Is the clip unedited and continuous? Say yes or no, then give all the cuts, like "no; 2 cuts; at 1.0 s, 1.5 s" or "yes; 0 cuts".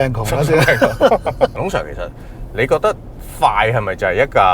no; 1 cut; at 1.5 s